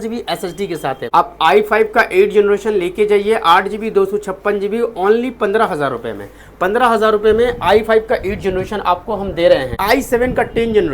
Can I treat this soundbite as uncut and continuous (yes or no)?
no